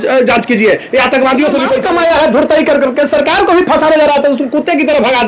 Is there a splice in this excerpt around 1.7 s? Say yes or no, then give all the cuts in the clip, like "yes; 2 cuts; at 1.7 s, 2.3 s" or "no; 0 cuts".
yes; 1 cut; at 1.7 s